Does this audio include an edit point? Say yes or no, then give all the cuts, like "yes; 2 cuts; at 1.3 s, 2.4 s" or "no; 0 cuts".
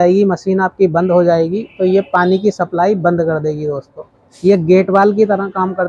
no; 0 cuts